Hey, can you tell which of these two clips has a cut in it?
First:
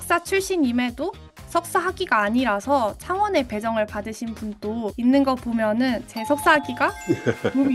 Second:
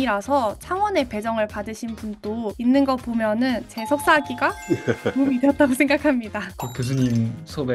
second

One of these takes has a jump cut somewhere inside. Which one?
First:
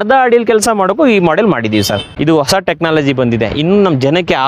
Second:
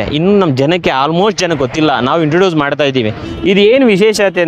first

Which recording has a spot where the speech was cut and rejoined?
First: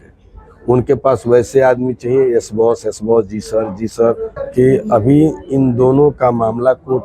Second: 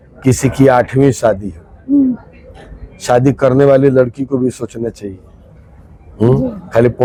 first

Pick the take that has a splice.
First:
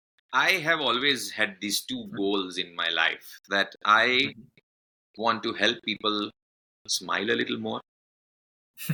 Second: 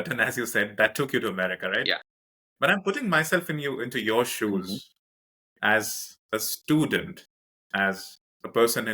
second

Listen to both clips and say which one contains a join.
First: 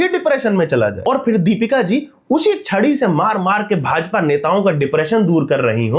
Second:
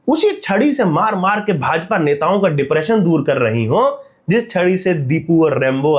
first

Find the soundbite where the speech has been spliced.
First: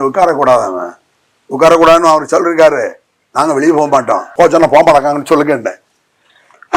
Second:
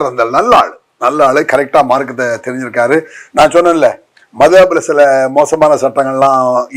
first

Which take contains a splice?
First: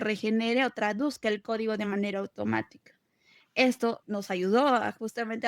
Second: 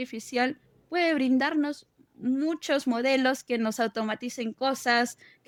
first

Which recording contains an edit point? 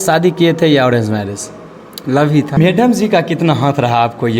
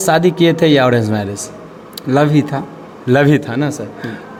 first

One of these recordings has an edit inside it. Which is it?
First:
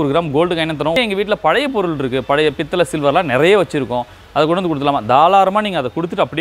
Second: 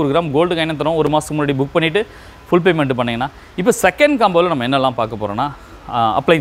first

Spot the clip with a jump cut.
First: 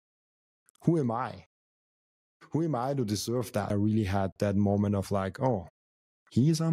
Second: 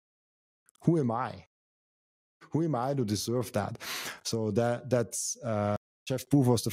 first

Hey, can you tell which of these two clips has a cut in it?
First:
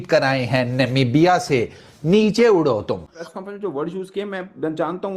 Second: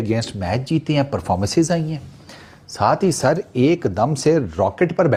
first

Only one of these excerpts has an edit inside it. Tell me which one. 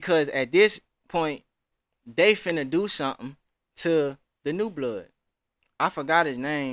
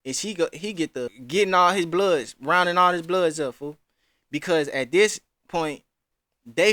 second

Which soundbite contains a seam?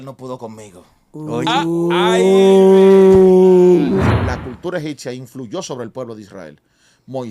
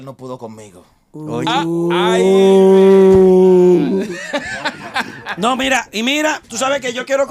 first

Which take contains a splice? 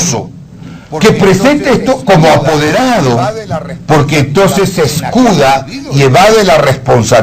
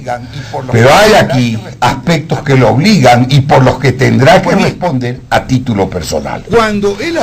second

